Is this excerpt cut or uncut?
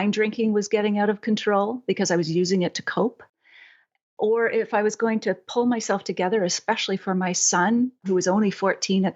uncut